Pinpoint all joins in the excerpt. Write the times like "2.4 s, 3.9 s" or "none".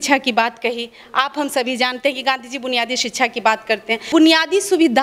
4.1 s